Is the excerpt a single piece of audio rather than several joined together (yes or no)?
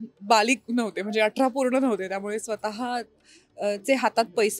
yes